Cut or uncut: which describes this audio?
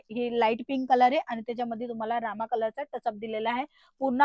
uncut